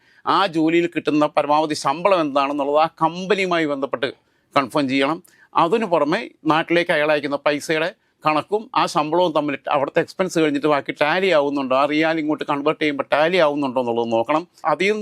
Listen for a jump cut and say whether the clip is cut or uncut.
uncut